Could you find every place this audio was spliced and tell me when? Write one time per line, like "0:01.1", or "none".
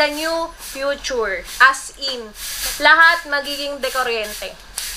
0:02.6

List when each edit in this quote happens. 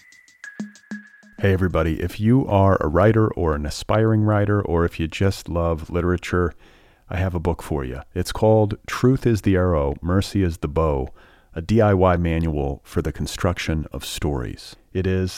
0:01.0

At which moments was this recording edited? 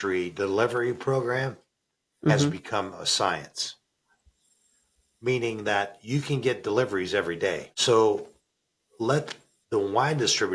0:07.7

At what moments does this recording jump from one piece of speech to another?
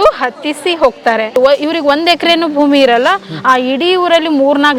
0:01.3

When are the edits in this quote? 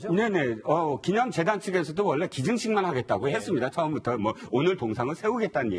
0:02.1

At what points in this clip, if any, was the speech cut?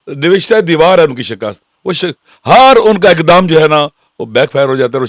none

